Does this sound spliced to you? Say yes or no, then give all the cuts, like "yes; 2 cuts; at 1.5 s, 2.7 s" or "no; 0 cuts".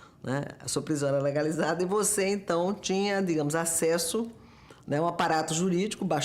yes; 1 cut; at 3.4 s